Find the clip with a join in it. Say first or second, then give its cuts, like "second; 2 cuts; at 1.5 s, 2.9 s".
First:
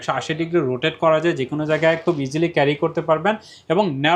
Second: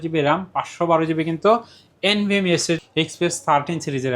second; 1 cut; at 2.8 s